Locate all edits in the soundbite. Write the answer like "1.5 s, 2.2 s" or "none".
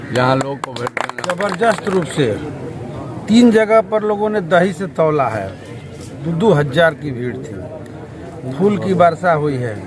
1.4 s